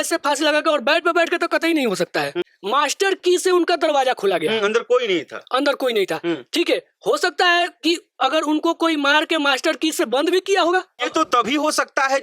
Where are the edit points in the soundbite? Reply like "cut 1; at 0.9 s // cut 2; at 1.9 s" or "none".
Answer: cut 1; at 2.5 s // cut 2; at 11.0 s